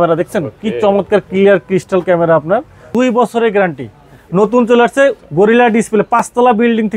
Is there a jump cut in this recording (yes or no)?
yes